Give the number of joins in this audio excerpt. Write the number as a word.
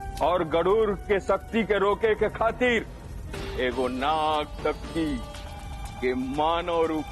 zero